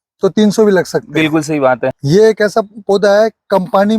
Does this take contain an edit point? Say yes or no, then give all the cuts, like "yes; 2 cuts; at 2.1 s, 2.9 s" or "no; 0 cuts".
yes; 1 cut; at 2.0 s